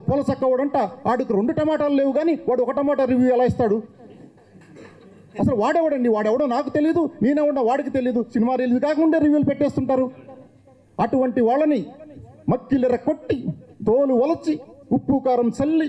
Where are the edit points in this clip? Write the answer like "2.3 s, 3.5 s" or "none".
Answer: none